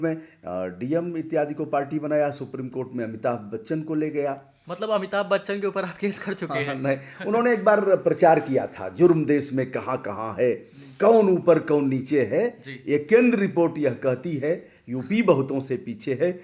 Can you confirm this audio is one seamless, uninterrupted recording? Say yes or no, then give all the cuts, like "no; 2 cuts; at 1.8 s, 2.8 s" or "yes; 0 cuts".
yes; 0 cuts